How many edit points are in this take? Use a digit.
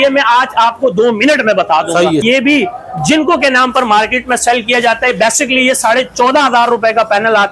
1